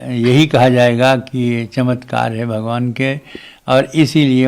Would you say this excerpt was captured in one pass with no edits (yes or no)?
yes